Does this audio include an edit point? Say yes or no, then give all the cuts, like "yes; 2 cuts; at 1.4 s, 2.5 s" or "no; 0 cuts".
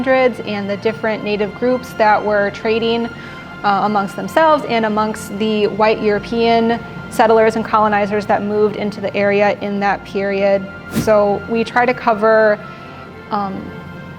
yes; 1 cut; at 11.0 s